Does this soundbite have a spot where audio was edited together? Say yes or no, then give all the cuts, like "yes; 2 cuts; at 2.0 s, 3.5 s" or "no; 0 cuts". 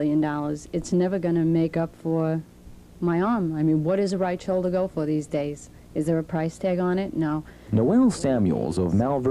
no; 0 cuts